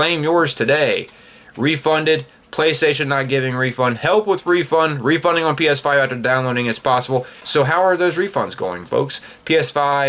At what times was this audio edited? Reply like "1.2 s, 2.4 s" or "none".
7.4 s